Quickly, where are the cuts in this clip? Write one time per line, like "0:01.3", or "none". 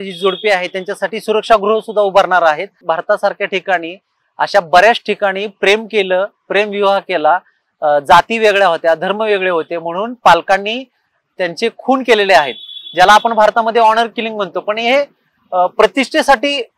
0:02.8